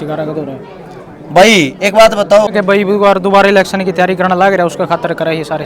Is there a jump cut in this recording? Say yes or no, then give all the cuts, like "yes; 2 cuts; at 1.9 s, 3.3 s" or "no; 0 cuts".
yes; 1 cut; at 2.5 s